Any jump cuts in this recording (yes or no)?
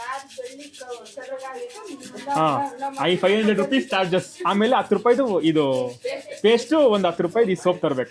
no